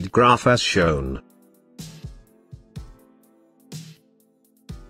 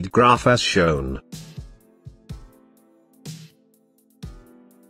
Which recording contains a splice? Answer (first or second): second